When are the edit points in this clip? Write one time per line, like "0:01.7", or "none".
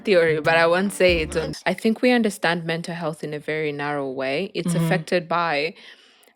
0:01.5